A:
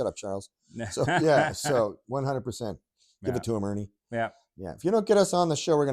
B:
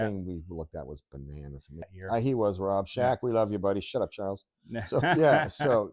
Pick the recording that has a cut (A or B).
B